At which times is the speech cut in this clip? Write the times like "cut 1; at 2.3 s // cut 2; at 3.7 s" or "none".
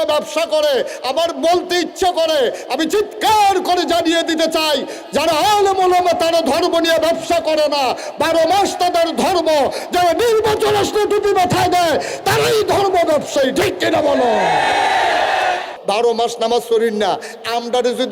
cut 1; at 15.7 s